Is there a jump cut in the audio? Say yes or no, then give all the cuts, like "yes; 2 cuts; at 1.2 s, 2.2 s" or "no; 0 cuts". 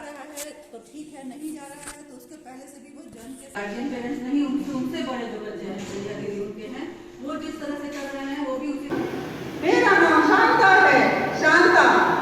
yes; 2 cuts; at 3.6 s, 8.9 s